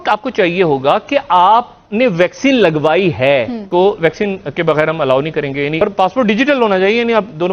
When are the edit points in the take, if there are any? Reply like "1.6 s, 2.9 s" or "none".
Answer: 3.6 s, 5.8 s